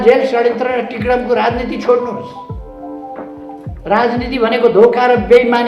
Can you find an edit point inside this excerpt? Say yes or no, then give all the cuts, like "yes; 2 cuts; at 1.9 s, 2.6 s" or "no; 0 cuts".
no; 0 cuts